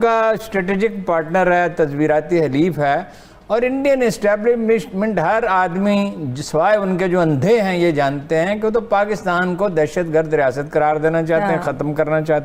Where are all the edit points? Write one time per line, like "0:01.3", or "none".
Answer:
none